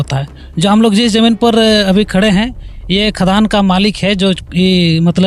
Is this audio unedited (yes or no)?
yes